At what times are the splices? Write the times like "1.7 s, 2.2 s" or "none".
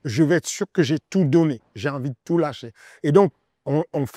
none